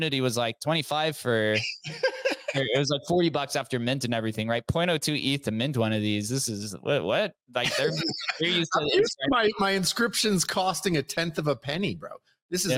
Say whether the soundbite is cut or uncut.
uncut